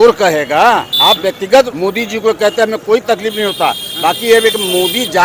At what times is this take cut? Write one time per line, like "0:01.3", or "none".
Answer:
0:00.9
0:01.7